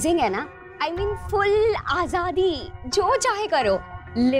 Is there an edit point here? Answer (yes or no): no